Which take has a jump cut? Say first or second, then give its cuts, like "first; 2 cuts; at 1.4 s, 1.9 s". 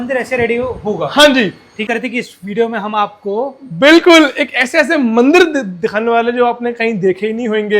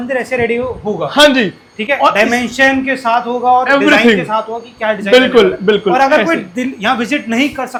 first; 1 cut; at 1.8 s